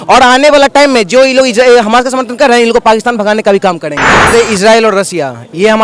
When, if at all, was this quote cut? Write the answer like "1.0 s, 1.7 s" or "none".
4.3 s